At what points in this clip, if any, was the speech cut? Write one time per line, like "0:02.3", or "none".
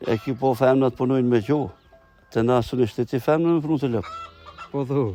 none